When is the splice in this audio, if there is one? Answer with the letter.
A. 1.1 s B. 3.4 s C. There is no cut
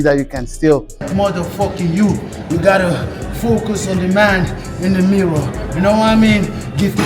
A